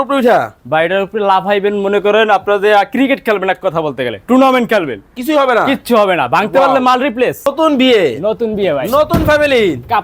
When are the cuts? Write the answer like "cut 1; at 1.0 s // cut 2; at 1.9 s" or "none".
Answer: cut 1; at 7.5 s